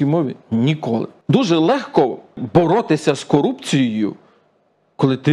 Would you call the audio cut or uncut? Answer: cut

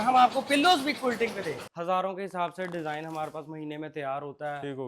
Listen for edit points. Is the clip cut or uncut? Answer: cut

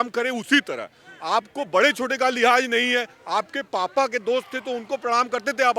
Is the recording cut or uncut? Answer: uncut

